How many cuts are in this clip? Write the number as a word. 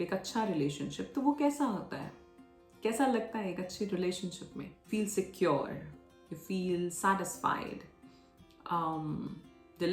one